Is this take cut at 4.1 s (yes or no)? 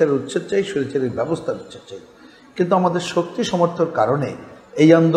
no